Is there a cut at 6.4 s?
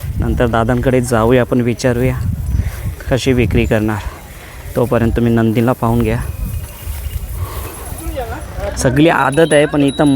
no; 1 cut; at 8.1 s

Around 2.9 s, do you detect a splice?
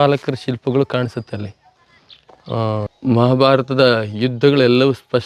yes; 1 cut; at 2.9 s

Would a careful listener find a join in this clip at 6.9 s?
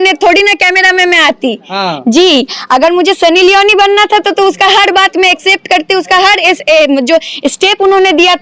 no; 0 cuts

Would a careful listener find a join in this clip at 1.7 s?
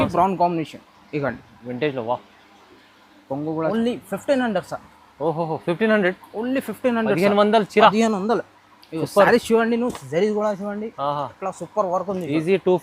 no; 1 cut; at 3.7 s

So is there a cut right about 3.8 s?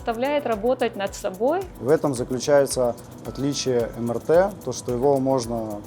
no; 1 cut; at 1.7 s

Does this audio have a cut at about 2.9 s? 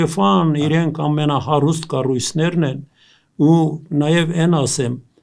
no; 0 cuts

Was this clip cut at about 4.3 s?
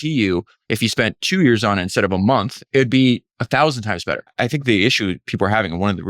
yes; 3 cuts; at 2.6 s, 3.3 s, 4.3 s

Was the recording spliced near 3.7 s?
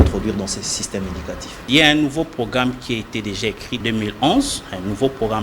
yes; 2 cuts; at 1.6 s, 3.7 s

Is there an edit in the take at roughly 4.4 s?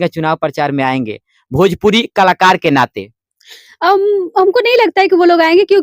no; 0 cuts

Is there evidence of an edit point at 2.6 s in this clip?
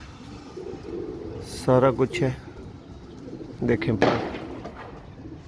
no; 0 cuts

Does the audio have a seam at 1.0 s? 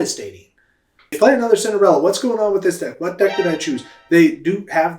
yes; 1 cut; at 1.0 s

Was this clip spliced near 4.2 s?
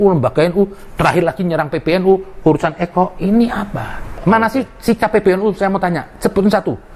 yes; 1 cut; at 4.2 s

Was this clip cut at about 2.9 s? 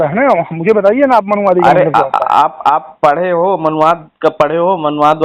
no; 0 cuts

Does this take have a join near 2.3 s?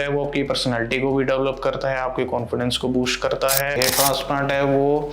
no; 1 cut; at 3.8 s

